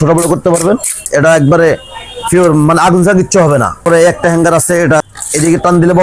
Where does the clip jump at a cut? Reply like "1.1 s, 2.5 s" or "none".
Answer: 1.0 s, 3.8 s, 5.0 s

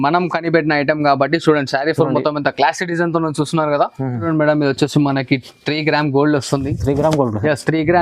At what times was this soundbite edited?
4.2 s

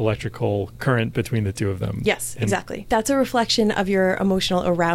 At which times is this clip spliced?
2.7 s

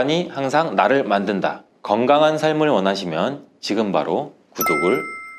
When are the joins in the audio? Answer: none

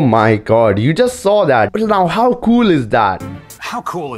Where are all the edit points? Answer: 1.7 s, 3.2 s

